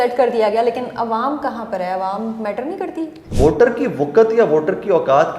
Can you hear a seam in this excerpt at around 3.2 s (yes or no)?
yes